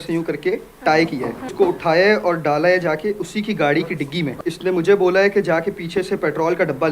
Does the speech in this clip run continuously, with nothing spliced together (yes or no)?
no